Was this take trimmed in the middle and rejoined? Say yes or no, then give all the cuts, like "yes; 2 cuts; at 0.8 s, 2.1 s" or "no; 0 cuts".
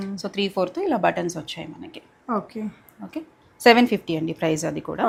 no; 0 cuts